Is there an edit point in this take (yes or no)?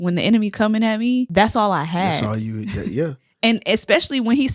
yes